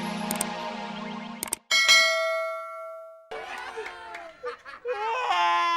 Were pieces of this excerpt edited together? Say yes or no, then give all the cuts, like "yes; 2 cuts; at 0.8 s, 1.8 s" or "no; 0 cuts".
yes; 2 cuts; at 1.4 s, 3.3 s